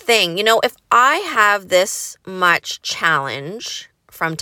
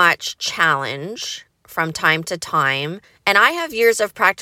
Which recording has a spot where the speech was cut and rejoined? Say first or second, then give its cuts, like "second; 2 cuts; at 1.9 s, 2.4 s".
second; 1 cut; at 3.1 s